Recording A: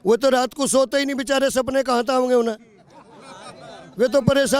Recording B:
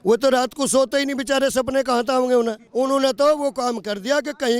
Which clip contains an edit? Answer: B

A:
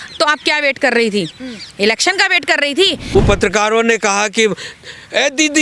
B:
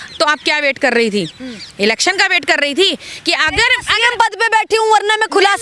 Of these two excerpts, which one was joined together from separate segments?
A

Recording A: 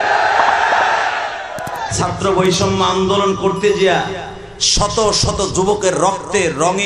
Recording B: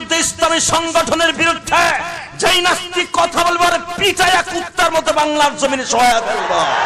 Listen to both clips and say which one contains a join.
A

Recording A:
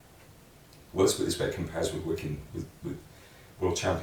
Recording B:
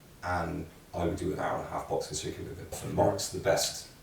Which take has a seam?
B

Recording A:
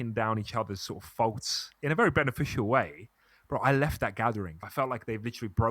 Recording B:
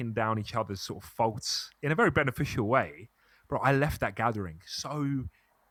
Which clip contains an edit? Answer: A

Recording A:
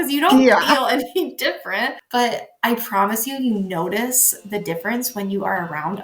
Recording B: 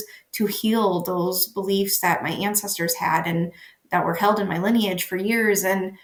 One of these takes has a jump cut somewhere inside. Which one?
A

